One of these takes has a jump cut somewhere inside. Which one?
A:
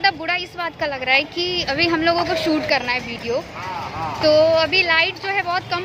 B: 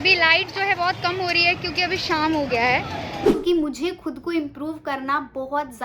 B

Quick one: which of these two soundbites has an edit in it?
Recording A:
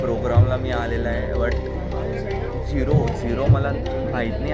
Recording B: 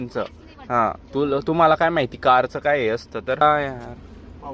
B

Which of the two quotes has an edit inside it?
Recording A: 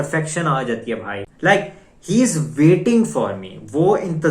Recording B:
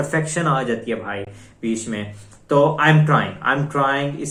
A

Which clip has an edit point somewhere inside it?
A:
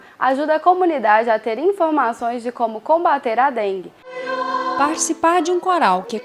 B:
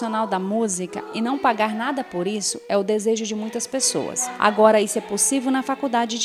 A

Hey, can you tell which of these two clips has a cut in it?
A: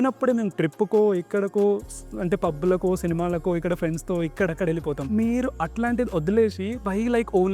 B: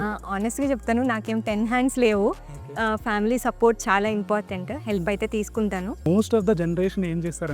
B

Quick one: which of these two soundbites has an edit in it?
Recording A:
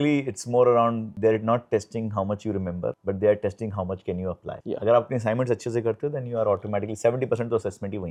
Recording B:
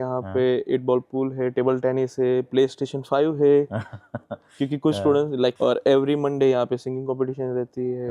B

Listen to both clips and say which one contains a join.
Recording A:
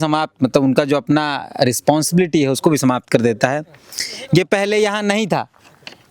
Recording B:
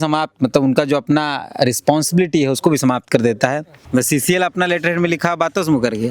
B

